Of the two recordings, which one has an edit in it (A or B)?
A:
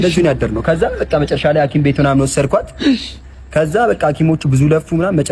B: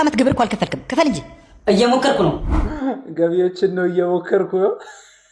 B